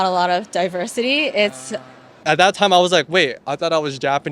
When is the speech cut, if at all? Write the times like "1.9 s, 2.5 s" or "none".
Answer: 2.2 s